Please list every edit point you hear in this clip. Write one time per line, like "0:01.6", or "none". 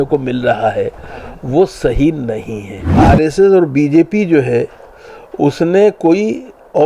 0:02.9